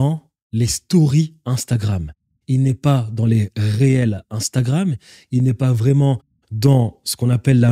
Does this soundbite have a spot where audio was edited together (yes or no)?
no